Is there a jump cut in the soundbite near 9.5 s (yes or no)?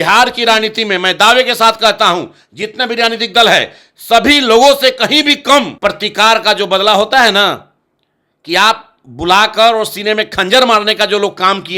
no